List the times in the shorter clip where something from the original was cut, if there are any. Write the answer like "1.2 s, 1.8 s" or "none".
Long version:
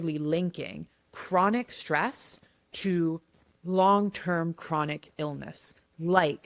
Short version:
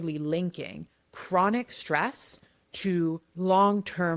3.3 s